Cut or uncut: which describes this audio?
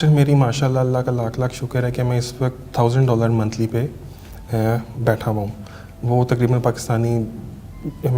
uncut